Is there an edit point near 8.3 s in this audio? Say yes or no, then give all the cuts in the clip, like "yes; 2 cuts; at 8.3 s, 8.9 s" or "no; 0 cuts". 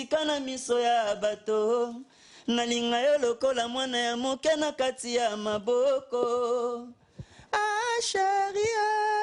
no; 0 cuts